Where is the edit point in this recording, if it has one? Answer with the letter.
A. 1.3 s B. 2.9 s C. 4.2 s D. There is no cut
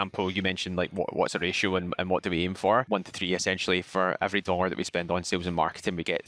B